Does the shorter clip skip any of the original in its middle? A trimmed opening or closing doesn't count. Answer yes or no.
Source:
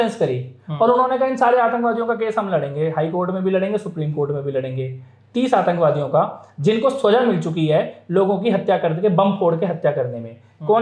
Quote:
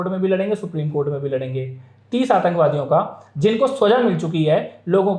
no